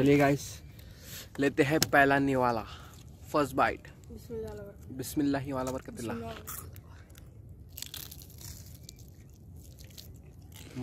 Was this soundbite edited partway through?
no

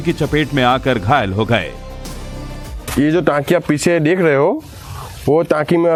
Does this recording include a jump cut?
no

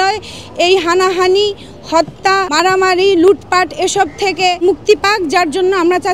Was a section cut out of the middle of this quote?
yes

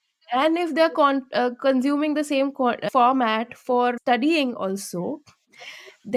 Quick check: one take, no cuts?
yes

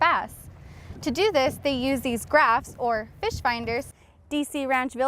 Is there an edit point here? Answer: yes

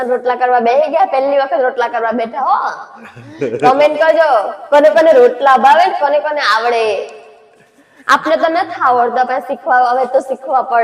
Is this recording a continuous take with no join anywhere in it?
yes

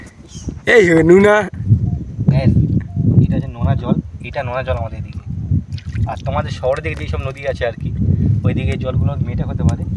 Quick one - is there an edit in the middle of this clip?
no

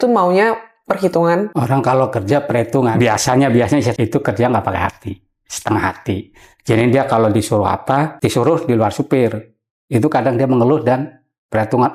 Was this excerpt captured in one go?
yes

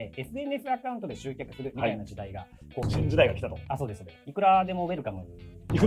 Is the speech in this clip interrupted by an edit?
yes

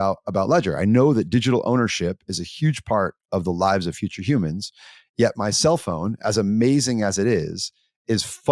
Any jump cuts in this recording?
no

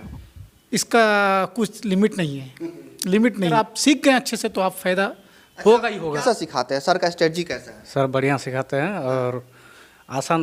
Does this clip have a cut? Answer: yes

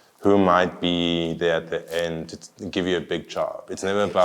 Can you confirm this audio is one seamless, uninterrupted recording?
yes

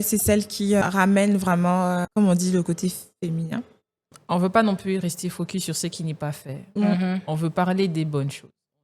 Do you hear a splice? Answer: yes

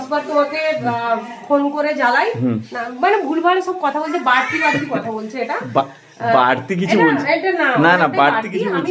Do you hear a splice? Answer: no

